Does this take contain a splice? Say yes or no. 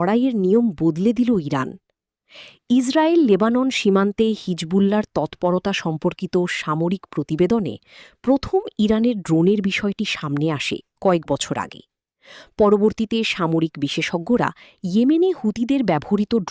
no